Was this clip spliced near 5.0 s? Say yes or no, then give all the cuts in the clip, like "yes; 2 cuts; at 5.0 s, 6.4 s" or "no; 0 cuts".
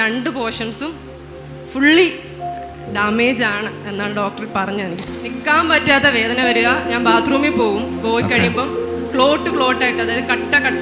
yes; 1 cut; at 5.0 s